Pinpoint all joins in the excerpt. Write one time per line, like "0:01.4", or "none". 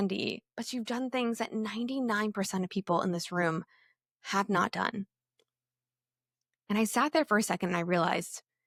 none